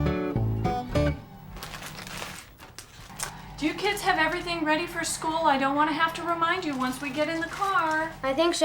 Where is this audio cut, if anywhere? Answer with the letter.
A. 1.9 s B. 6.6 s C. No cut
A